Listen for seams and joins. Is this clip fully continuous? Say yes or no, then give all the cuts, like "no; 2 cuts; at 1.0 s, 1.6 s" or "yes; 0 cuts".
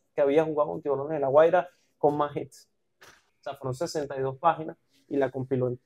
no; 1 cut; at 3.3 s